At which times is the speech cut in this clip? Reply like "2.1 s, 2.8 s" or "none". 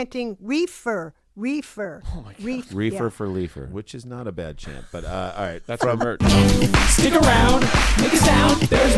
6.2 s